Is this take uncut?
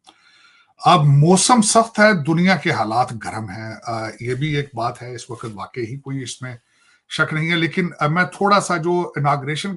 yes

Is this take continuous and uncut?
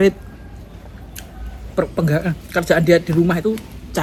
yes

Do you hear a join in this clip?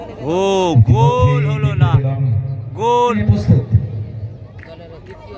yes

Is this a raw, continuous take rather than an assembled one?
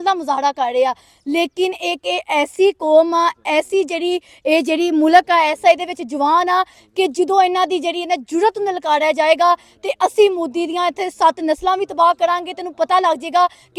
yes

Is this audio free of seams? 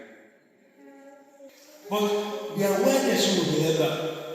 no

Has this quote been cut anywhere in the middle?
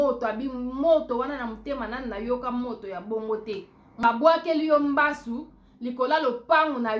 yes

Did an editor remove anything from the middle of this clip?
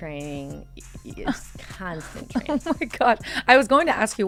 no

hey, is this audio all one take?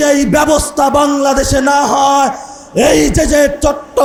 yes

